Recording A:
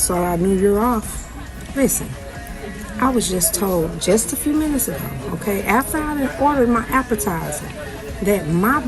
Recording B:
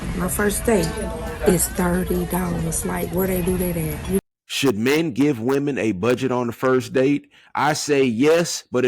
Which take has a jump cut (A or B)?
B